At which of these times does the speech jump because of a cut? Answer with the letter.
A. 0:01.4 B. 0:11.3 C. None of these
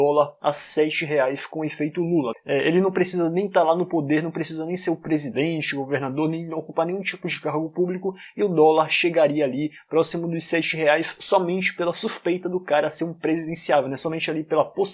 C